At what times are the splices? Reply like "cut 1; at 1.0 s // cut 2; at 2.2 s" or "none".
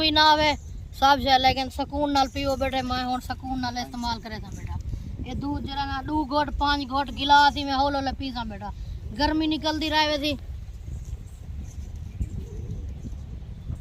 none